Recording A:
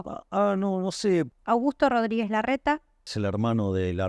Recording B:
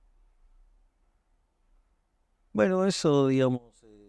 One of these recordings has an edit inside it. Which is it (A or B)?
A